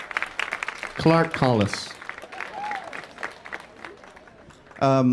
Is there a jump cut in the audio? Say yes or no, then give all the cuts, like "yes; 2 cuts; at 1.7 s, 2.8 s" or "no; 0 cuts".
no; 0 cuts